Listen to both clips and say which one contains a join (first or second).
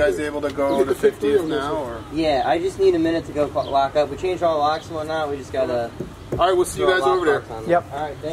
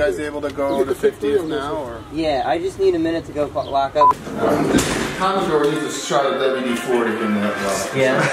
second